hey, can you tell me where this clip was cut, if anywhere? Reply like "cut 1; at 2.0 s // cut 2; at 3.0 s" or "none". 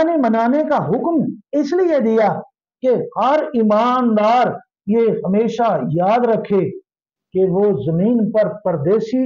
none